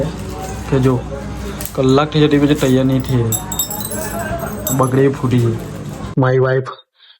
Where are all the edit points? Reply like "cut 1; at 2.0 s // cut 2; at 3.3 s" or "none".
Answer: cut 1; at 6.0 s